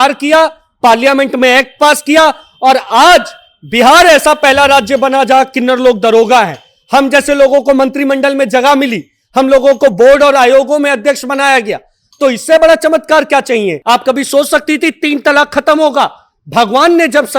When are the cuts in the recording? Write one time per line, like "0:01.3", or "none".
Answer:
0:13.8

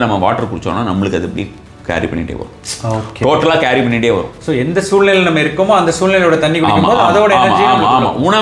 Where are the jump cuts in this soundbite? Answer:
none

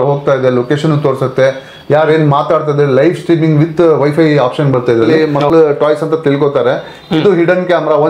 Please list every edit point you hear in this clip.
0:05.1

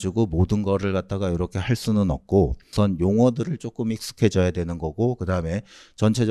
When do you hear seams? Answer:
0:02.7

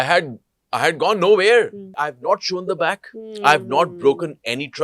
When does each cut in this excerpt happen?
0:02.0

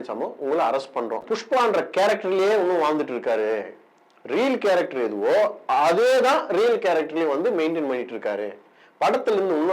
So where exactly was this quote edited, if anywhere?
0:01.2

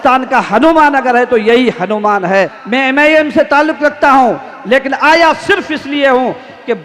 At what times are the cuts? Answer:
0:02.6

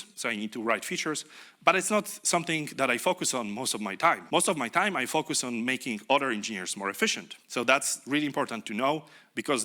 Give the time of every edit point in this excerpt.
0:04.2
0:07.3

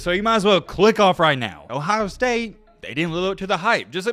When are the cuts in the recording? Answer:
0:01.6

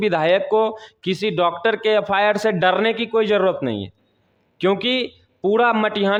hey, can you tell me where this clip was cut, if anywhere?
none

